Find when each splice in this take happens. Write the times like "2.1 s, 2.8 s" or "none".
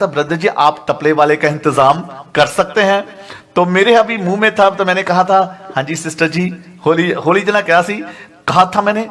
none